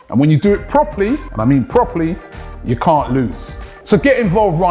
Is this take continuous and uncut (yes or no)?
no